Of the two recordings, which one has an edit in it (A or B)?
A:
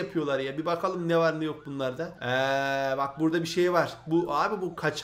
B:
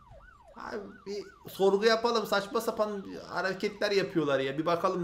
A